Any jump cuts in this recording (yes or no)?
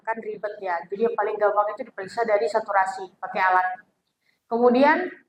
no